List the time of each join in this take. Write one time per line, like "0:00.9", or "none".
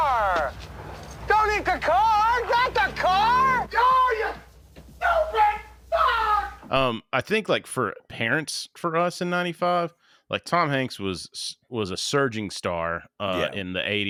none